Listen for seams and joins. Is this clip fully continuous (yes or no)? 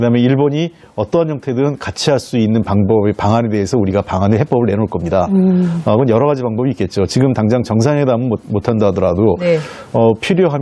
no